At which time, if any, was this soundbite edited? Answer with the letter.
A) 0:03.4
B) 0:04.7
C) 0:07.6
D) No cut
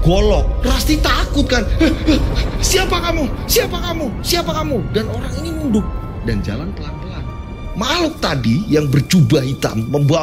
C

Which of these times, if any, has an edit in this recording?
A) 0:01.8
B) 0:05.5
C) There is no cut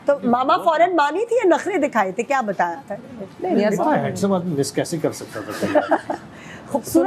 C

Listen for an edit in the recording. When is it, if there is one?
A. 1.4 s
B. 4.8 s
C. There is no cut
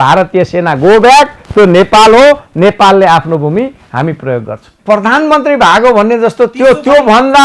B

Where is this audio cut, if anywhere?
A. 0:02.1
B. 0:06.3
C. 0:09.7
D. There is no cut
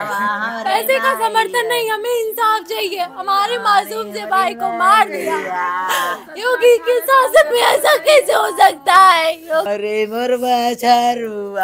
C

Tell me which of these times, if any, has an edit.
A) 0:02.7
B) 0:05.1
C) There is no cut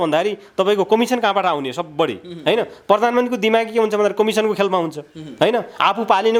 C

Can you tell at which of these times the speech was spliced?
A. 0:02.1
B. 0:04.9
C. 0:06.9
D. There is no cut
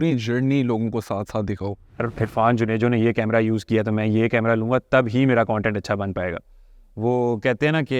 A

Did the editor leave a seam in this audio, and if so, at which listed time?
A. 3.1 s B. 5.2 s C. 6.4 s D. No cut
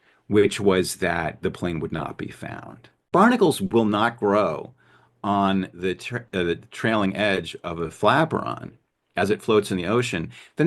A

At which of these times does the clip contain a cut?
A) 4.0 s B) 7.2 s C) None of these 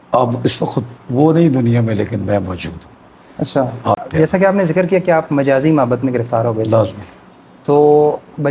A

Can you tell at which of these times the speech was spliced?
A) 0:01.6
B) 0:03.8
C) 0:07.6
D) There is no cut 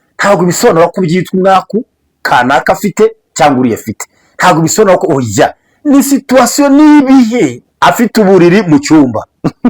C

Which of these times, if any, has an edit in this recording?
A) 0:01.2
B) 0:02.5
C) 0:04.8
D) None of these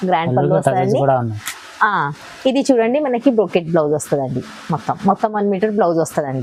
D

